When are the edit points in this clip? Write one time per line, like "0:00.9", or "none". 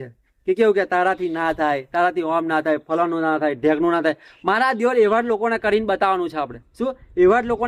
none